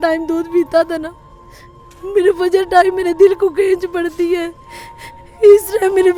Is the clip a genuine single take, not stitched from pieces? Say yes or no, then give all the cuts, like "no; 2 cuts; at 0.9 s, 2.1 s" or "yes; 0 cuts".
yes; 0 cuts